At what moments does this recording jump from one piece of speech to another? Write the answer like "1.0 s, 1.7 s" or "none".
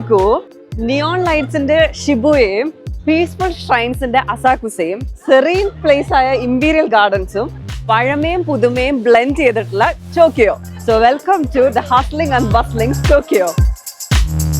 10.7 s, 13.5 s